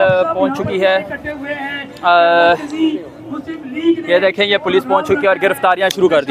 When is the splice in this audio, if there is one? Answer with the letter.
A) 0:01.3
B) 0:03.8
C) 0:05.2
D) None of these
D